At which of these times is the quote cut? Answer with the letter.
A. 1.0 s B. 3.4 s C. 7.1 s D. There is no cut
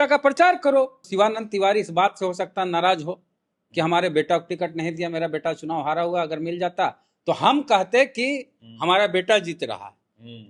A